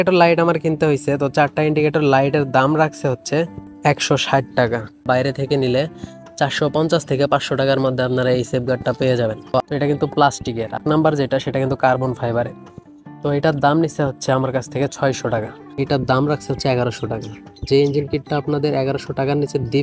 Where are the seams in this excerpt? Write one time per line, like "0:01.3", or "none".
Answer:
0:05.1
0:09.6
0:15.8